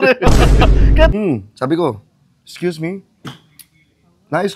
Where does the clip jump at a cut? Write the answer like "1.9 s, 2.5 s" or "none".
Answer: 1.1 s